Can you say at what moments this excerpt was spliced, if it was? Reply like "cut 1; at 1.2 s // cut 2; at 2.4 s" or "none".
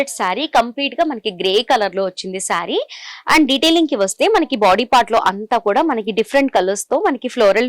none